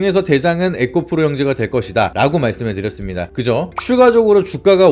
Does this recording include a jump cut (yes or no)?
yes